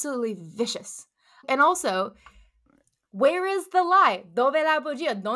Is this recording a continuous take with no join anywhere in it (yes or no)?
no